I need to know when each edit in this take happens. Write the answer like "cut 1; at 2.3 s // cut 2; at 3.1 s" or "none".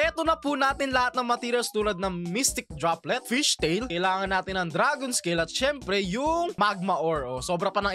none